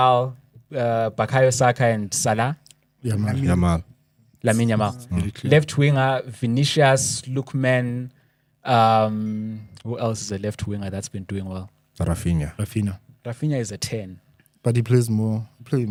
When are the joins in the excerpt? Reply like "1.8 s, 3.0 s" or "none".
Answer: none

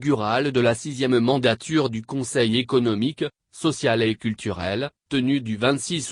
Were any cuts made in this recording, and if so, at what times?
2.2 s, 5.0 s

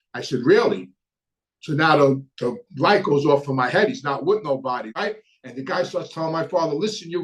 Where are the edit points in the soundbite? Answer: 4.8 s

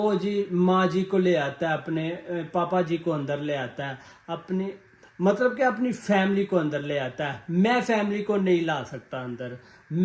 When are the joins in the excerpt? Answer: none

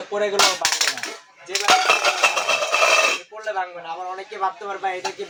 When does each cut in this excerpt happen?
none

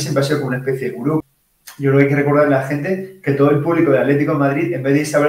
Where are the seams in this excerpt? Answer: 1.4 s

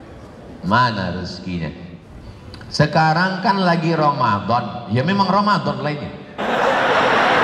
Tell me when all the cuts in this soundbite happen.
2.0 s

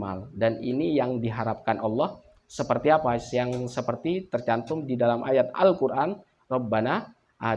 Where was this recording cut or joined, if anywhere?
none

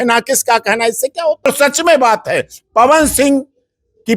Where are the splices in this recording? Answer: 1.5 s

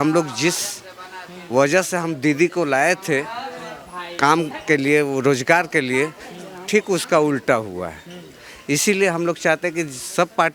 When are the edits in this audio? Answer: none

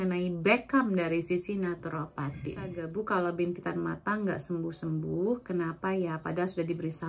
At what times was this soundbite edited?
2.8 s

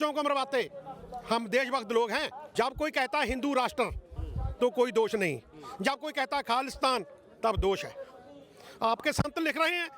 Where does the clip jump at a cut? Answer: 2.4 s

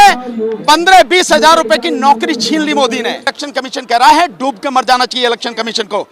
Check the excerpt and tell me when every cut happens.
3.3 s

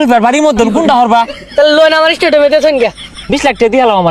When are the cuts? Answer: 1.4 s, 3.1 s

